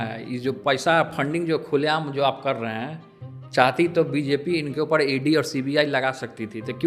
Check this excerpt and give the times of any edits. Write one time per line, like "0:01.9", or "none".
none